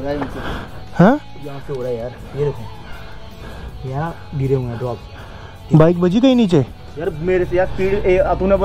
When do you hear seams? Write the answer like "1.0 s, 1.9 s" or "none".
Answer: none